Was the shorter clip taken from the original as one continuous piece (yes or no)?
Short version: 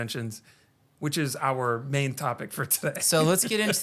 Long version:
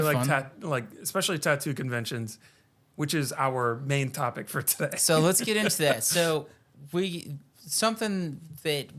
yes